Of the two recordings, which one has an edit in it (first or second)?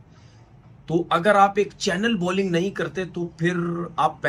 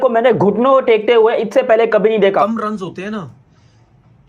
second